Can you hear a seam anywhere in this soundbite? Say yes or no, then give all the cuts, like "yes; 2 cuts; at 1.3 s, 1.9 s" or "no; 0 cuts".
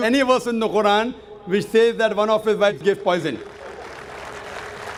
no; 0 cuts